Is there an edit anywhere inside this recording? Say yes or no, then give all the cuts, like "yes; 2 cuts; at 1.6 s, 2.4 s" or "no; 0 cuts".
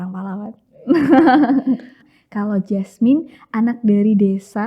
yes; 1 cut; at 2.1 s